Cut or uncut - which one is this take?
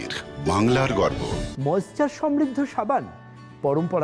cut